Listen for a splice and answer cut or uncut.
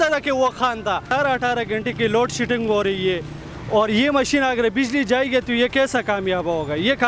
cut